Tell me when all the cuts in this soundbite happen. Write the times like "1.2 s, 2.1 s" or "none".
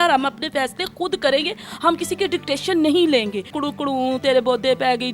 3.5 s